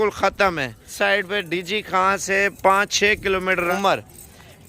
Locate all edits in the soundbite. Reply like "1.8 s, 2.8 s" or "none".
0.9 s, 3.7 s